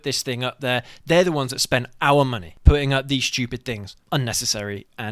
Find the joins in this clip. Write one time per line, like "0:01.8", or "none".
0:02.5
0:03.9